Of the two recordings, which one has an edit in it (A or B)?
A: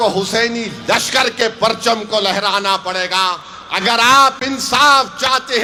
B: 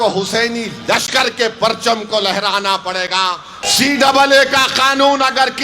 B